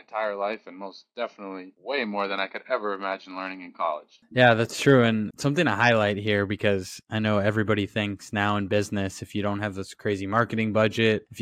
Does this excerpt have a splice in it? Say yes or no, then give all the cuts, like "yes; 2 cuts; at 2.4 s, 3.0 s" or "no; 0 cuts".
no; 0 cuts